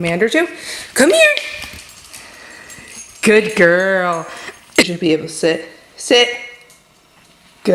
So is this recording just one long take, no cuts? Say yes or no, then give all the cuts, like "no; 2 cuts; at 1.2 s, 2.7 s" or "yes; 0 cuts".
no; 1 cut; at 4.8 s